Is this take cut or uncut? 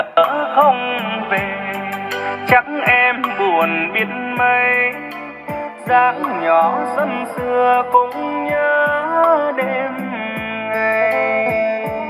uncut